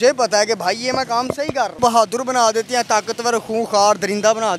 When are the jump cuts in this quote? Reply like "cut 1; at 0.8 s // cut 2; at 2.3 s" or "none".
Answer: cut 1; at 1.8 s